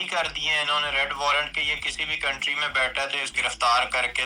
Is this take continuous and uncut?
no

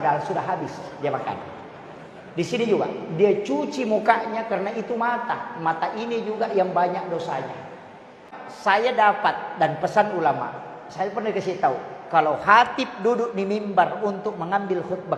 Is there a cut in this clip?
yes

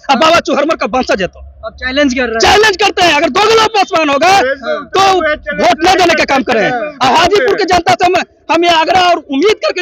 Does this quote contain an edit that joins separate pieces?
no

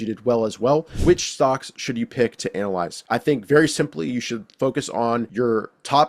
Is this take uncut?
no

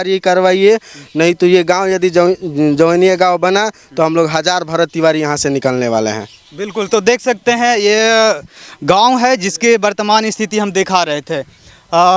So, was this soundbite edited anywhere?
no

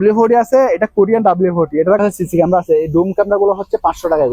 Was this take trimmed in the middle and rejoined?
yes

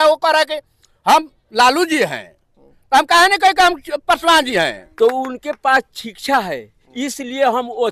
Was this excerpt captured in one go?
no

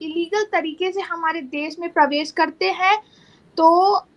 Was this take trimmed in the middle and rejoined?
no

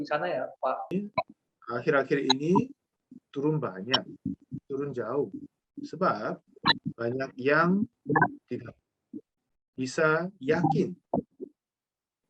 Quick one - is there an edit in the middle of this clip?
yes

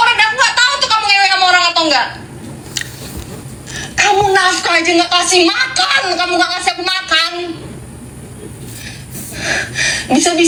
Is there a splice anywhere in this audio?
no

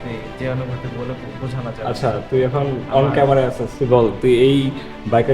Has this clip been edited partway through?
no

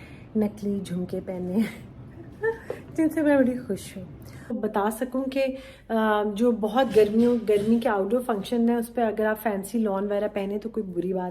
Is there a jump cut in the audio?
yes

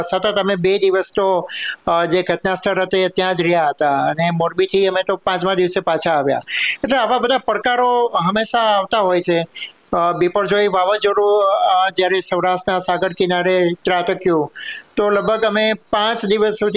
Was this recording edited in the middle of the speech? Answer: no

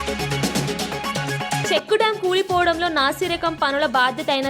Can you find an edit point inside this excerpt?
no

